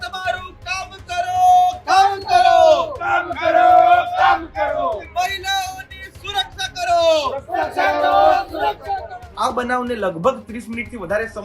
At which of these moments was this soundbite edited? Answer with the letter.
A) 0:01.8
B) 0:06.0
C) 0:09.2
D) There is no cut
C